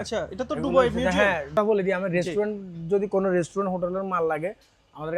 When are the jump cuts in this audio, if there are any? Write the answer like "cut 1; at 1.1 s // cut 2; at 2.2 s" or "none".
cut 1; at 1.6 s